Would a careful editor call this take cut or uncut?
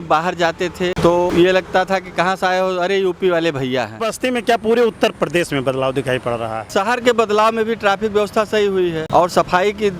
cut